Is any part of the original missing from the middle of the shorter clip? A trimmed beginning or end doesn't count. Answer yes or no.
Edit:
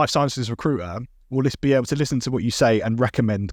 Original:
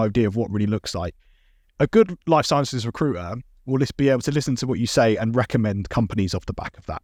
no